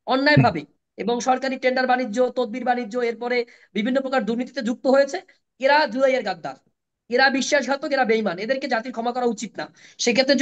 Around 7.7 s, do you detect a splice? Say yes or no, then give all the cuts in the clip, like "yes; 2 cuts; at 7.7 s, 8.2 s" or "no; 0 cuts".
no; 0 cuts